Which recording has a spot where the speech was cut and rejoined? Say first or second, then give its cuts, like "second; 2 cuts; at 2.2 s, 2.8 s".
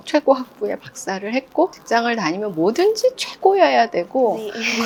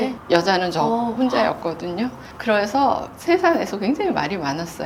second; 1 cut; at 2.4 s